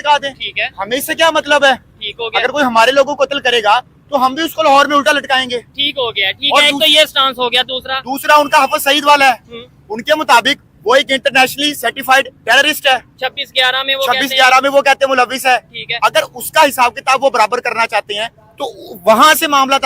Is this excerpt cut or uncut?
uncut